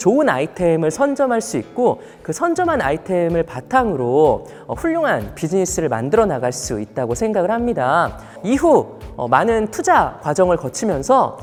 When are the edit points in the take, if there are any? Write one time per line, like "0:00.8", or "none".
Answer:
none

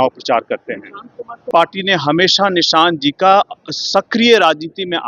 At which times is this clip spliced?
0:01.4

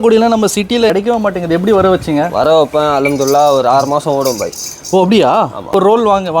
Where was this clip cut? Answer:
0:00.9
0:05.7

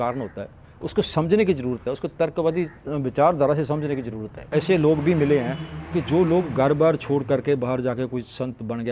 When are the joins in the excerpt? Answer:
0:04.4

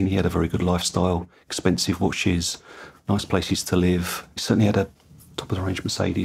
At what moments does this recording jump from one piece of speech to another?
none

